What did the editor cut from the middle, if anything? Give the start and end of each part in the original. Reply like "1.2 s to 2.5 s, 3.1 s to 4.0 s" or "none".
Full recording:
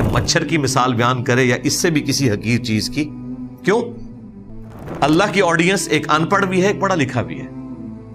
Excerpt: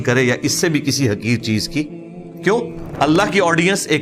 4.0 s to 4.8 s